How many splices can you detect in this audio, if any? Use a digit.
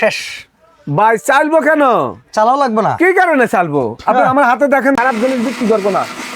1